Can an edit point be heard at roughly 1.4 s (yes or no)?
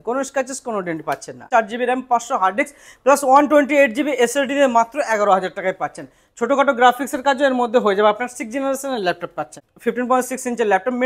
yes